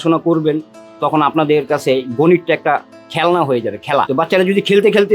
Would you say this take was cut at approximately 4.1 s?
yes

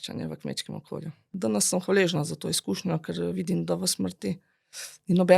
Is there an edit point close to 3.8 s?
no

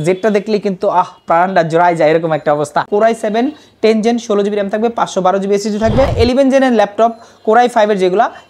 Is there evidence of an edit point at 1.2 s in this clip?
no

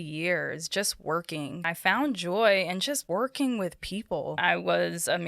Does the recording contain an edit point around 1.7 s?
yes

